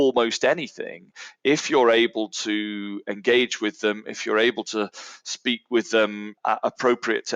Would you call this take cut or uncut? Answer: cut